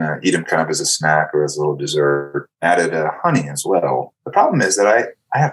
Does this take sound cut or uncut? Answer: cut